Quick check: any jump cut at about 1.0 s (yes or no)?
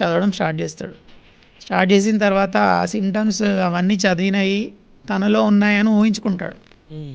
no